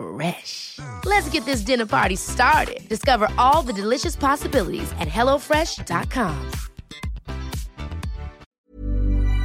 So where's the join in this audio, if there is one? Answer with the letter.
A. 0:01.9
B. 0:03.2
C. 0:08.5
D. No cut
C